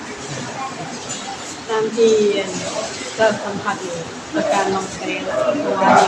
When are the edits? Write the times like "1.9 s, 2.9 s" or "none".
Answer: none